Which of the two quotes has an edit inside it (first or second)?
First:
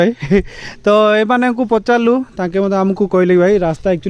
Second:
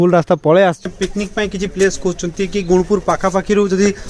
second